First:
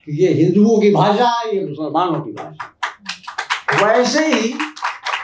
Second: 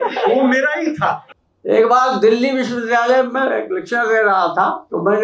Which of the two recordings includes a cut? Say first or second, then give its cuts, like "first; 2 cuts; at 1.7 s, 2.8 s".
second; 1 cut; at 1.3 s